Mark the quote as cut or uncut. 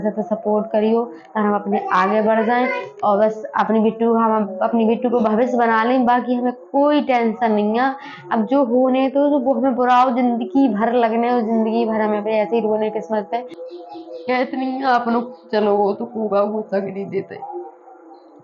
cut